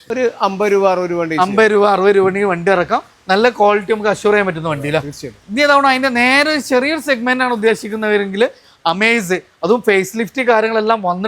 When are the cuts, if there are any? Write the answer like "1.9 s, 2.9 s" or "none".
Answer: none

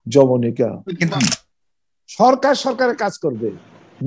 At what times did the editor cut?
0.9 s

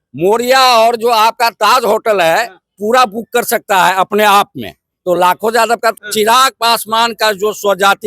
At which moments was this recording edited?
5.9 s

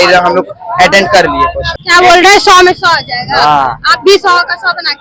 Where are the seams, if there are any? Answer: 1.8 s

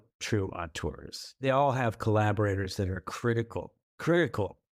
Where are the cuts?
1.4 s

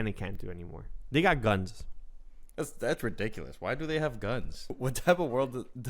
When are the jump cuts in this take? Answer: 4.7 s

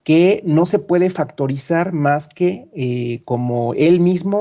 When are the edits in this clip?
3.4 s

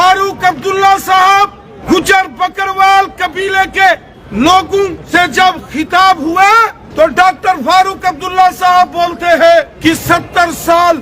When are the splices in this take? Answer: 1.7 s, 4.2 s, 5.0 s, 6.8 s, 9.7 s

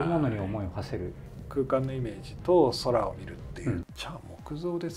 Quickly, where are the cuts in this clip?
1.2 s, 3.8 s

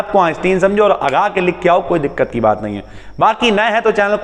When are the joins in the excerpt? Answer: none

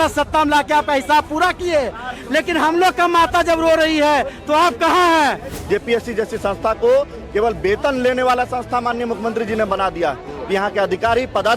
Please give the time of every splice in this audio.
5.5 s

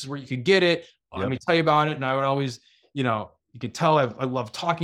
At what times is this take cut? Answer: none

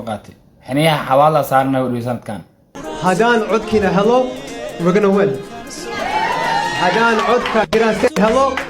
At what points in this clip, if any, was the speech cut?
2.7 s

